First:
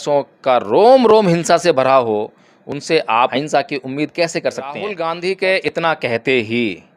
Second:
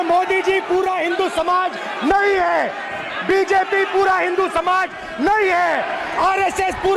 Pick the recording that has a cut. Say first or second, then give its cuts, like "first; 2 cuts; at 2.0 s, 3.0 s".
first; 2 cuts; at 3.3 s, 4.9 s